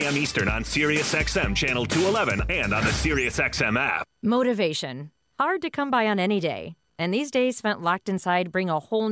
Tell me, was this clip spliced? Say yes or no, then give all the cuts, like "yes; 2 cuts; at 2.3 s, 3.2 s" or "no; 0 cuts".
yes; 1 cut; at 4.0 s